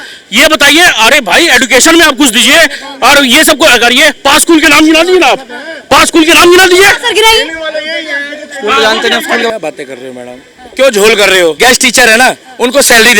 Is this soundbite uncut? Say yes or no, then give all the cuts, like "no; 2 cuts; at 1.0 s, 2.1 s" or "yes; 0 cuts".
no; 2 cuts; at 9.5 s, 11.6 s